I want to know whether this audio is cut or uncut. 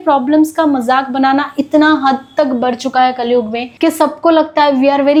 uncut